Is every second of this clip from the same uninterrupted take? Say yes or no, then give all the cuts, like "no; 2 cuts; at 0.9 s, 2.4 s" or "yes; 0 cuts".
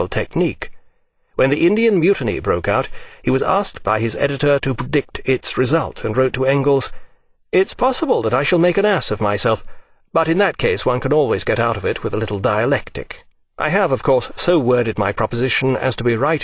yes; 0 cuts